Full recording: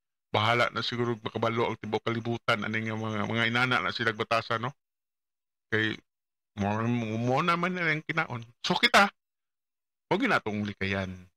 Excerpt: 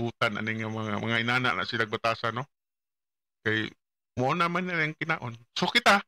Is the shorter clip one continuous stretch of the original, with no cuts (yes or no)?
no